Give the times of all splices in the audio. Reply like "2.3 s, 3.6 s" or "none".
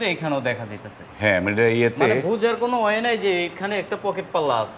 none